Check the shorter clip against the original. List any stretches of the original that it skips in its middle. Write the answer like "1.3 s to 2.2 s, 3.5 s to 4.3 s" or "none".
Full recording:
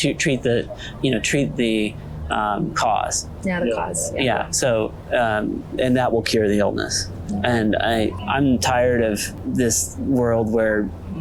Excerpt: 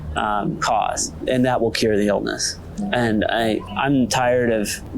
3.3 s to 5.6 s

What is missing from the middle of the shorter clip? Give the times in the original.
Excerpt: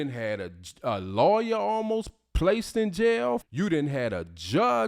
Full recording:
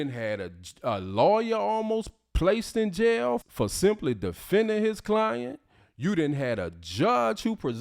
3.5 s to 5.9 s

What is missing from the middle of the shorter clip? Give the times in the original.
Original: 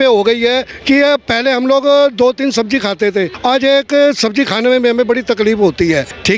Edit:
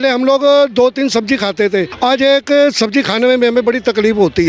none

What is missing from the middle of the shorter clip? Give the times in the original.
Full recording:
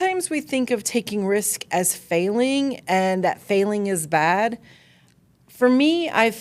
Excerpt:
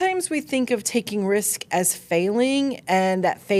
none

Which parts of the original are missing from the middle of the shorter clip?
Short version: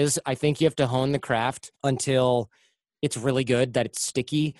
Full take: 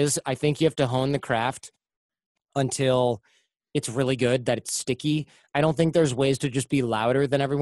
1.7 s to 2.4 s

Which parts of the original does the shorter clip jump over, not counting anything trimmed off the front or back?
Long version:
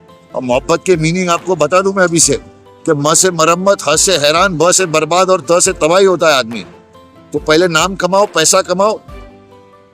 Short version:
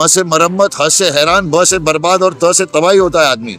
none

